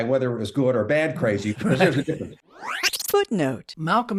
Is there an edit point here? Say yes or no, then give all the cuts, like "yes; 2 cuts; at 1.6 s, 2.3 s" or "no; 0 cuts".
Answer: no; 0 cuts